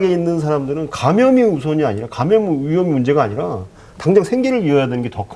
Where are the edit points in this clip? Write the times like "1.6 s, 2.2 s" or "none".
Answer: none